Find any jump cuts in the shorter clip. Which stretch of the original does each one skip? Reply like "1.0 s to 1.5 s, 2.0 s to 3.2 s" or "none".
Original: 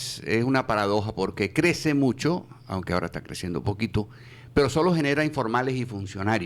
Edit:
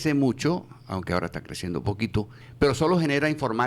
4.2 s to 4.4 s

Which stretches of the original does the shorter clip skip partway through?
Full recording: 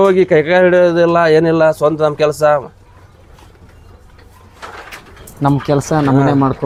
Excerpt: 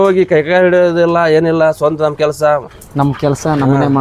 2.8 s to 5.2 s

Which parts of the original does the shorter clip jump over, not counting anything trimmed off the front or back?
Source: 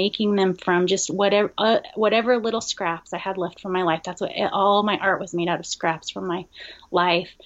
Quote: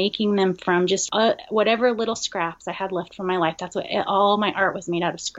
1.1 s to 1.5 s

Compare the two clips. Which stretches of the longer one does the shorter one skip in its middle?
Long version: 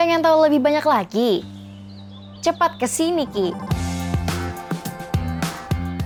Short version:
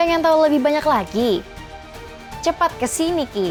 none

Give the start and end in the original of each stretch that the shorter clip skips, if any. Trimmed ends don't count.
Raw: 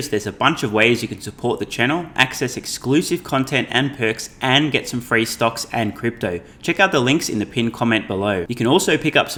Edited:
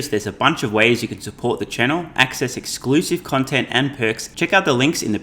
4.3 s to 6.5 s

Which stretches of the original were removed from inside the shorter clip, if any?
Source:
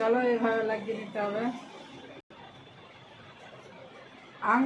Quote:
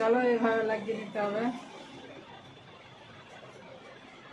2.2 s to 2.3 s

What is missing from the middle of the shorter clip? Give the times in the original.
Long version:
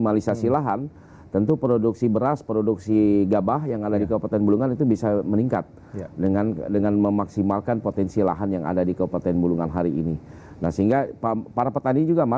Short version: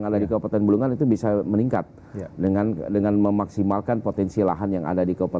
none

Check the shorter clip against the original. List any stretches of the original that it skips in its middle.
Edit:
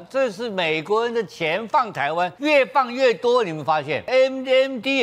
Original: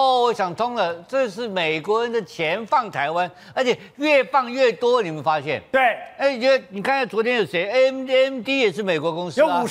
3.3 s to 3.9 s, 5.6 s to 7.7 s

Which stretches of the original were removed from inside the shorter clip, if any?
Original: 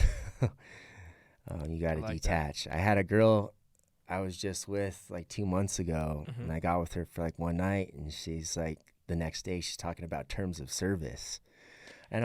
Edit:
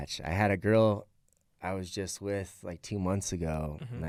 none

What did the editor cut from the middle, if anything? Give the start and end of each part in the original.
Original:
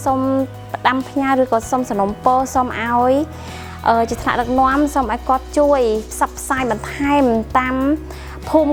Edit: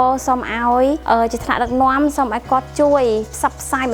3.3 s to 3.8 s

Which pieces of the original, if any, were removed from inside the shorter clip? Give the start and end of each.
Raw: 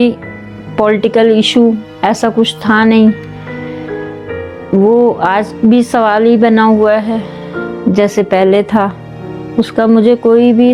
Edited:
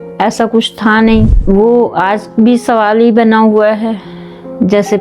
3.2 s to 4.6 s

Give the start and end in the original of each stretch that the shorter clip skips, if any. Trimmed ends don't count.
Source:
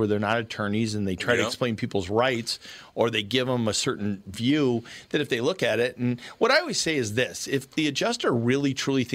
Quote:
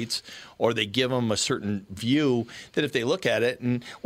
none

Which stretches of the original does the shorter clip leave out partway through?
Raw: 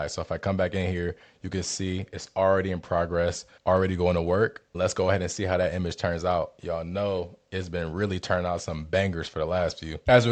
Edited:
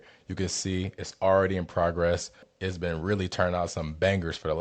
3.5 s to 7.3 s

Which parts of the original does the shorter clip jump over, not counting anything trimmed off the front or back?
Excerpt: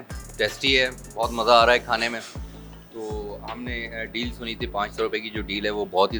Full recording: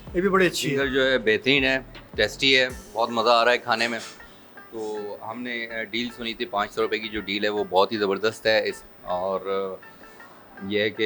none

